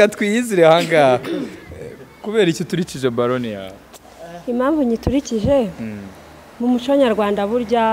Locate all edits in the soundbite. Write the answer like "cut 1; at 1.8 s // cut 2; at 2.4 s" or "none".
none